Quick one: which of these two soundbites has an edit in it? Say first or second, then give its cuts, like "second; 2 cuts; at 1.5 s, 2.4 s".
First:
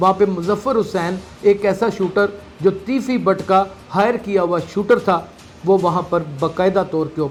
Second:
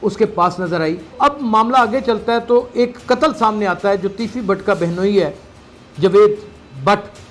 second; 1 cut; at 1.1 s